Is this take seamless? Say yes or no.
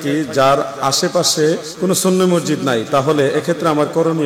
no